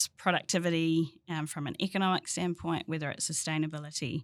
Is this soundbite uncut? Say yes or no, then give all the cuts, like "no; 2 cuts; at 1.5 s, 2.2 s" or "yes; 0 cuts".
yes; 0 cuts